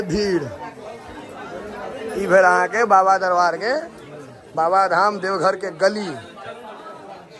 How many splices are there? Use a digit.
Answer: 0